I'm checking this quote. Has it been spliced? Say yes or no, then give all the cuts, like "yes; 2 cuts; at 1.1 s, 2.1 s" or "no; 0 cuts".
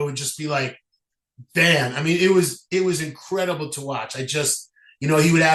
no; 0 cuts